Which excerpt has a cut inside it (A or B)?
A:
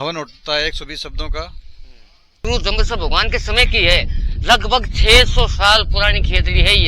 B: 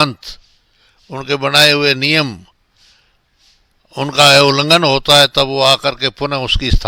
A